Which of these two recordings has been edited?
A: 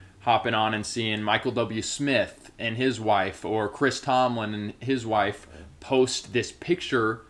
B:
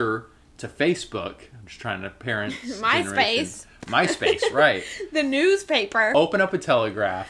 B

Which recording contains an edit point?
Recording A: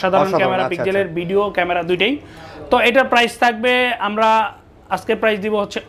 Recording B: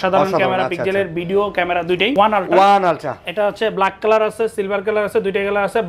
B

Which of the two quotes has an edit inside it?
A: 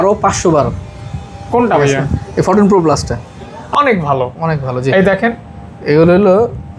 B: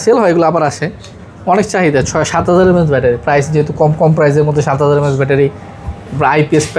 A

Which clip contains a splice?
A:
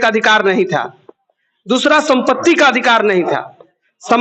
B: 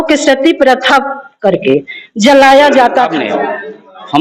B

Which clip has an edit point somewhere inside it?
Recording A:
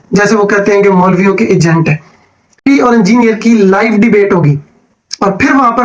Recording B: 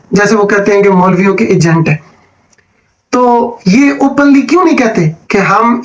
A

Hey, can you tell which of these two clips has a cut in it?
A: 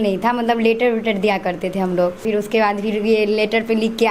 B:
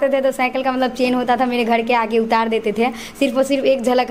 A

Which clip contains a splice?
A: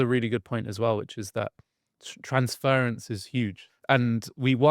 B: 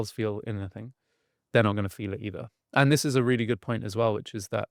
A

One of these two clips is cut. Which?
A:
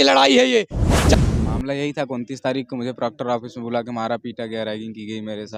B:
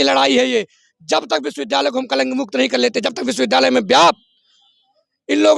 A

